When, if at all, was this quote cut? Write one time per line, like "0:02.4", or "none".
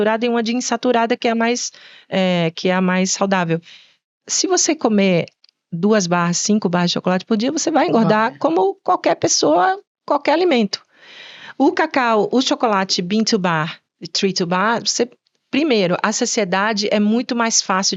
none